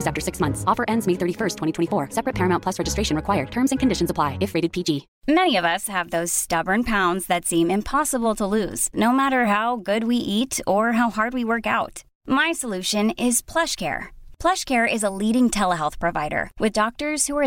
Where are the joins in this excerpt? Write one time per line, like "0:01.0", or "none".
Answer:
0:05.1